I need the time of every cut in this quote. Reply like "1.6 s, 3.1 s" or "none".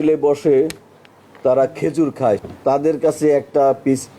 2.4 s